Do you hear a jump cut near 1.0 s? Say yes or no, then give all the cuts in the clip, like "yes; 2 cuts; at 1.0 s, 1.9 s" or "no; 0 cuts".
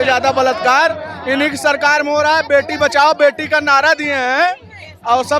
no; 0 cuts